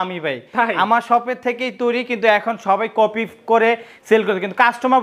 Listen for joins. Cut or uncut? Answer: uncut